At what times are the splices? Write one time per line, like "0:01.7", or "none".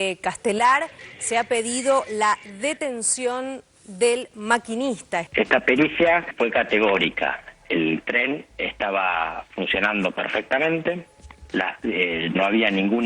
0:05.3